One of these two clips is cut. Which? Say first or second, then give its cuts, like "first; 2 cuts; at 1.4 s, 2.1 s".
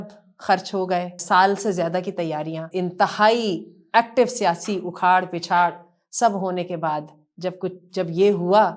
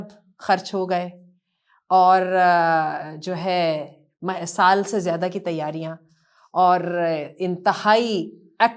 first; 2 cuts; at 1.2 s, 2.7 s